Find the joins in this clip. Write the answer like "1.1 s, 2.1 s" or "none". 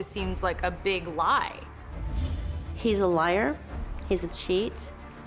2.1 s